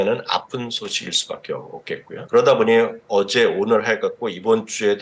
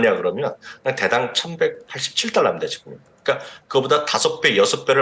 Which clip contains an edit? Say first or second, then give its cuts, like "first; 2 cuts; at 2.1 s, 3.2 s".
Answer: first; 1 cut; at 2.2 s